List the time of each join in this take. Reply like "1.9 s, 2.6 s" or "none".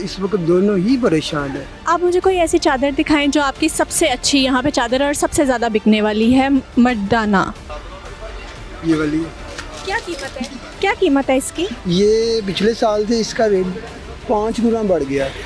none